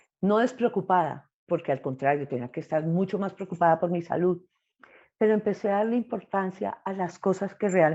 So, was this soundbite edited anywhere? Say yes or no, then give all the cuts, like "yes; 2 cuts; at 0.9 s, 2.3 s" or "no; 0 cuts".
no; 0 cuts